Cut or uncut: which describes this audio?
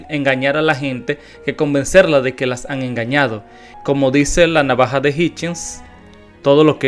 cut